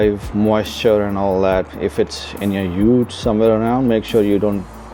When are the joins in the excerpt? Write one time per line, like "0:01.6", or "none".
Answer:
none